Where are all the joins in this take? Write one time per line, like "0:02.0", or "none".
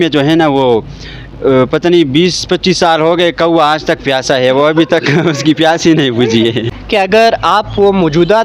0:06.7